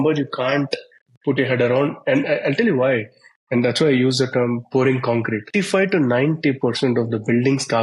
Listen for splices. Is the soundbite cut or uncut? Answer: cut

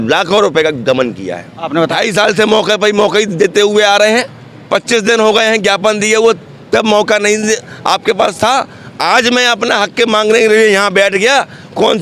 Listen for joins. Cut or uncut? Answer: cut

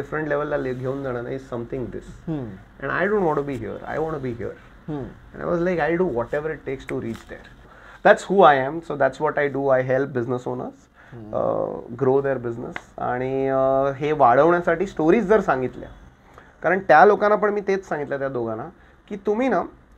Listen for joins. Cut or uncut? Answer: cut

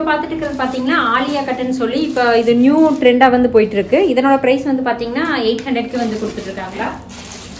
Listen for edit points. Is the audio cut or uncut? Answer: cut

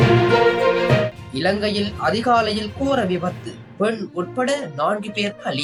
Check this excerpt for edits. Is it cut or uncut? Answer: uncut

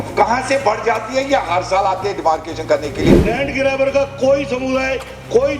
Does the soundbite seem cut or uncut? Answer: cut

